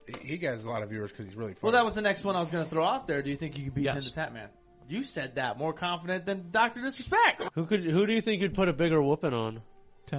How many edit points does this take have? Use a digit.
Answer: 1